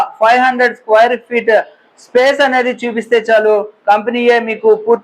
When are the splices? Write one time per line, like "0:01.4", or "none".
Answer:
none